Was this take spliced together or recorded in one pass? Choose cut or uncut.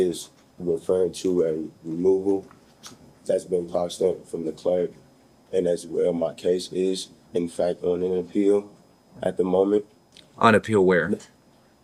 uncut